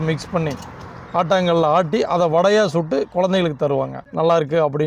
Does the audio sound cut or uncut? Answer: cut